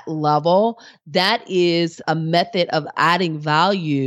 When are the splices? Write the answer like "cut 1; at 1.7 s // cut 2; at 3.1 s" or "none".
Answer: cut 1; at 2.0 s // cut 2; at 2.9 s